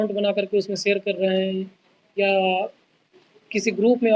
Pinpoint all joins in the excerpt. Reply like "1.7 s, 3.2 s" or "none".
none